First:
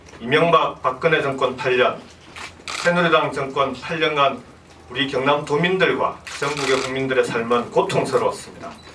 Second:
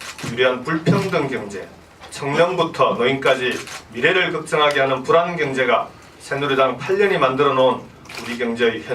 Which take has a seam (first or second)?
second